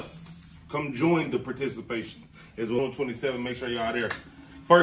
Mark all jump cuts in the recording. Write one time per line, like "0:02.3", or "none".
0:02.8

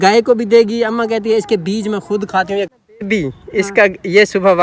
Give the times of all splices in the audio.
0:02.7

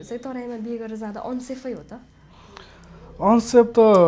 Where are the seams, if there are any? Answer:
none

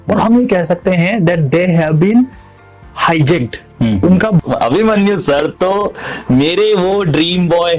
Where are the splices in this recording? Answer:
0:04.4

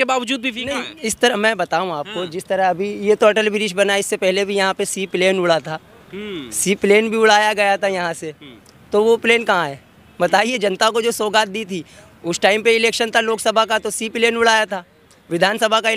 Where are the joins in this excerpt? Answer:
none

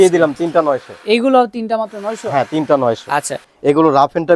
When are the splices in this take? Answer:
0:03.4

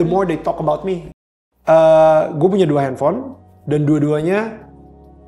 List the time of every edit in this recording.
0:01.1

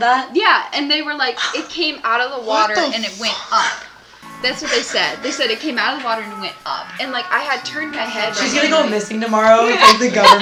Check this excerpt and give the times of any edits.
none

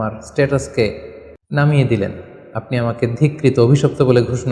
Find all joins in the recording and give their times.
none

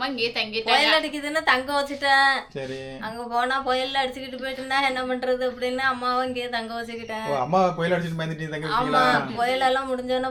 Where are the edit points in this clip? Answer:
none

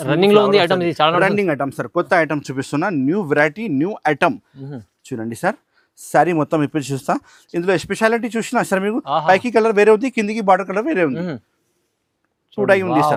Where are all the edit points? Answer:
none

